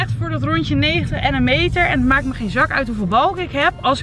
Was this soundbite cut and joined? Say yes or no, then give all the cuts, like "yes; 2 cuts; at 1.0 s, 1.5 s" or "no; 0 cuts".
no; 0 cuts